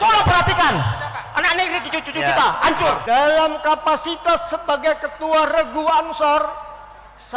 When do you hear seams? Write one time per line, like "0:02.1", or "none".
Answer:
0:03.0